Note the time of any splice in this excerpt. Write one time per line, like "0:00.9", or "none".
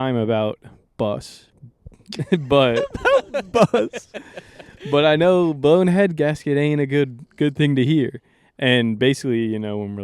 none